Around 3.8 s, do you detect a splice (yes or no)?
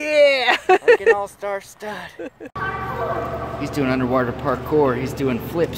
no